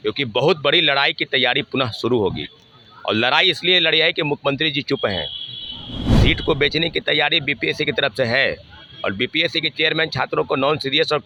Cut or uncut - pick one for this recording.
uncut